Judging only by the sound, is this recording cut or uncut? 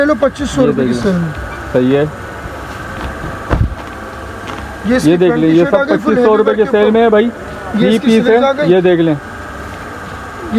uncut